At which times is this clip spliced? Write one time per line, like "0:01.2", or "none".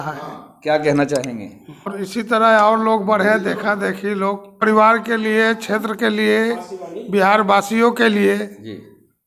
0:01.9
0:04.6